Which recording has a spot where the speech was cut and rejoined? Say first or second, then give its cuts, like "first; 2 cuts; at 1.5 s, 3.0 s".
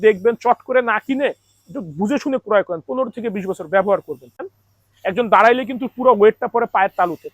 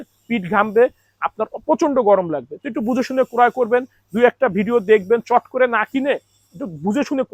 first; 1 cut; at 4.5 s